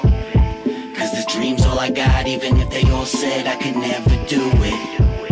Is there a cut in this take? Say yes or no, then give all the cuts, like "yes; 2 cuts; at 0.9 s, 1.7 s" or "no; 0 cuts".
no; 0 cuts